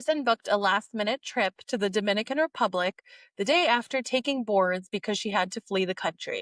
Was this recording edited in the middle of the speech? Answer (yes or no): no